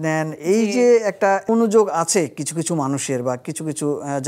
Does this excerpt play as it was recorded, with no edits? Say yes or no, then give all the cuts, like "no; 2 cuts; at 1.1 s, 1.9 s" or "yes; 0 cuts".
no; 1 cut; at 1.5 s